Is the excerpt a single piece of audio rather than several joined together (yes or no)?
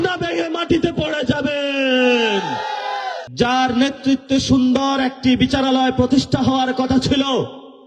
no